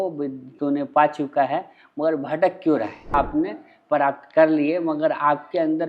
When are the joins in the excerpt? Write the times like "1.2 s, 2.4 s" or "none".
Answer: 3.1 s